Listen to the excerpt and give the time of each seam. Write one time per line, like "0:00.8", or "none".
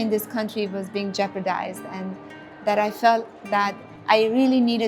0:03.9